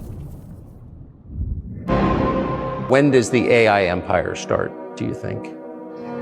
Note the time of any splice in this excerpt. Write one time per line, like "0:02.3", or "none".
none